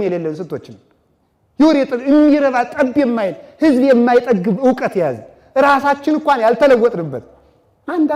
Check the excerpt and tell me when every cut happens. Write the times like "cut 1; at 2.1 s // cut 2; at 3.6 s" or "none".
none